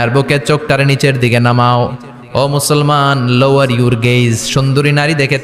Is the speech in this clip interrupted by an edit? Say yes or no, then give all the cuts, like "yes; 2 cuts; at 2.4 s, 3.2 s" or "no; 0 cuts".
no; 0 cuts